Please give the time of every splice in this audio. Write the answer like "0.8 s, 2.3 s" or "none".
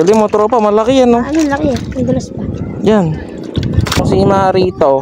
3.9 s